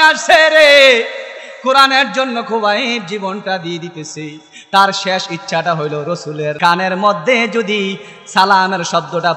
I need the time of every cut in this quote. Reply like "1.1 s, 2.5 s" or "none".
6.6 s